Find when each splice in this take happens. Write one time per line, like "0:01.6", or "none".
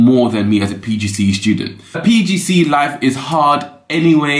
0:02.0